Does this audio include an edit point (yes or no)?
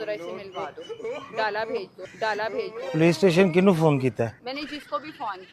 yes